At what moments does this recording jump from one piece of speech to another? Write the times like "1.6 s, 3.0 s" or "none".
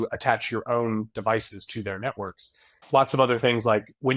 2.7 s